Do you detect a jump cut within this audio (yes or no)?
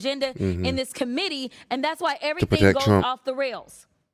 no